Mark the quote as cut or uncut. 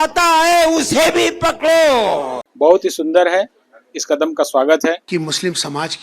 cut